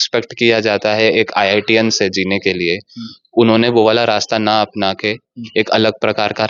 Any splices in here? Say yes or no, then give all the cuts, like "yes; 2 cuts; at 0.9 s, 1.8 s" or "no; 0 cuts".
no; 0 cuts